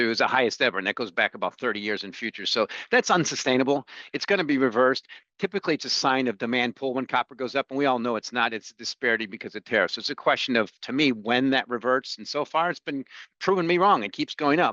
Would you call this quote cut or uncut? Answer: uncut